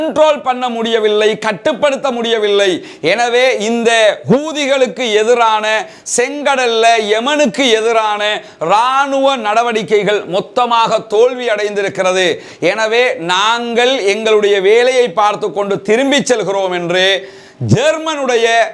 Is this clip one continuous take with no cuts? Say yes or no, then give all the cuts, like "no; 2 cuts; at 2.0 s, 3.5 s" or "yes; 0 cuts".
yes; 0 cuts